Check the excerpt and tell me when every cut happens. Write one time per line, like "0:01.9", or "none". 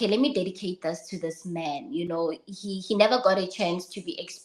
none